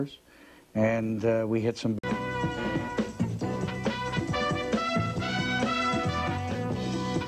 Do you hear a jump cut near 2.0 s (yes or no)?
no